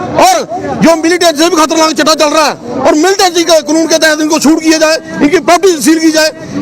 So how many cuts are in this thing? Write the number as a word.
zero